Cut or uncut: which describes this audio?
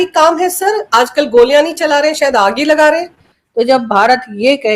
cut